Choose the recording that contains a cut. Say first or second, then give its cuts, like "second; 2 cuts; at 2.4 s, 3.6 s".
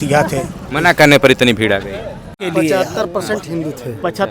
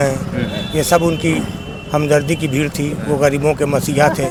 first; 1 cut; at 2.5 s